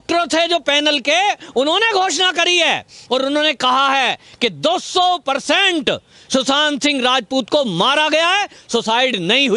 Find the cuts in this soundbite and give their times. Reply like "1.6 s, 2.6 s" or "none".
none